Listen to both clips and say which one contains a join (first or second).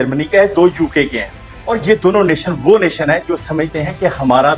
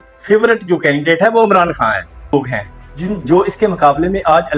second